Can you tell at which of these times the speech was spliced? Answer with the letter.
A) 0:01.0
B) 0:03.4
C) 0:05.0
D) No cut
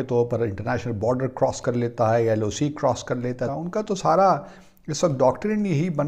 B